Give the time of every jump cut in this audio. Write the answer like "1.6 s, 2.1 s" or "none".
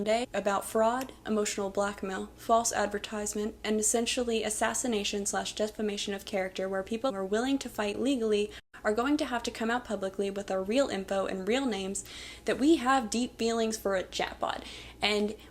7.1 s